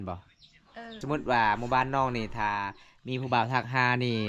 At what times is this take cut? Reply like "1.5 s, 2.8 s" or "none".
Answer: 0.9 s